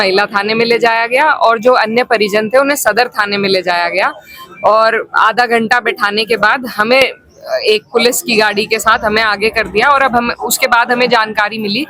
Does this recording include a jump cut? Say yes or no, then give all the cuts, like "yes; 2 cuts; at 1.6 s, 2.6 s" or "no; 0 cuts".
no; 0 cuts